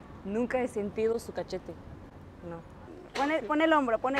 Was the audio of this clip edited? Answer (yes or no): yes